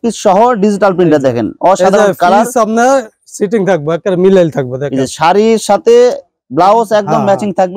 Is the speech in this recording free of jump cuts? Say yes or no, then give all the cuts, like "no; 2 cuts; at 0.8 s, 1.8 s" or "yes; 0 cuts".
yes; 0 cuts